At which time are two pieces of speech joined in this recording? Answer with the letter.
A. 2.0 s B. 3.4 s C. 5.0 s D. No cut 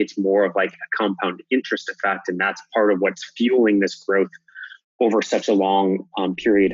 D